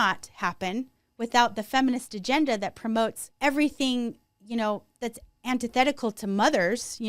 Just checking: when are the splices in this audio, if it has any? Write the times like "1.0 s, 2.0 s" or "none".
3.2 s

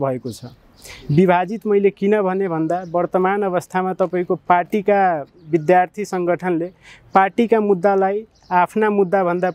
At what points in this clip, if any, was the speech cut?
none

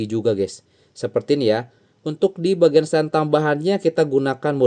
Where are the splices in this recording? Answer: none

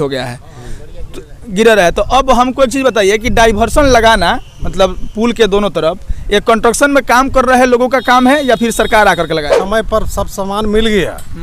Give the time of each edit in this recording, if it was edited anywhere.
9.6 s

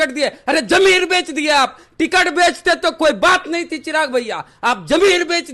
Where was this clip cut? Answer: none

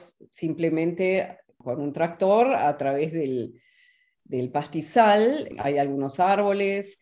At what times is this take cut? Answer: 1.5 s, 5.5 s

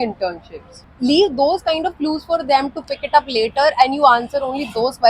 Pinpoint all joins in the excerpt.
0.9 s

